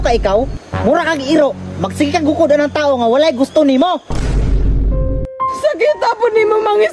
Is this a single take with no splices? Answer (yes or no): yes